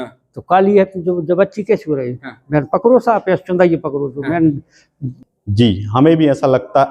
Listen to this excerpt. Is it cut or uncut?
cut